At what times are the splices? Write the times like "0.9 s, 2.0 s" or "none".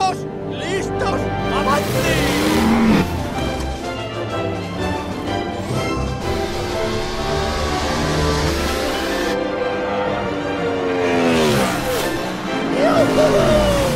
2.4 s, 7.1 s